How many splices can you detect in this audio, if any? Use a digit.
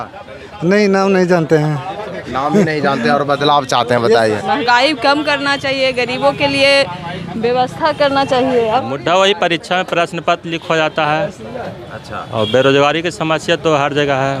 2